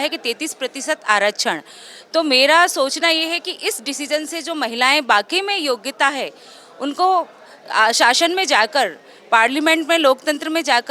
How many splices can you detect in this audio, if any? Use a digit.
0